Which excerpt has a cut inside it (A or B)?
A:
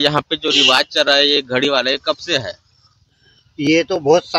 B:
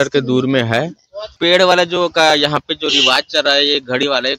B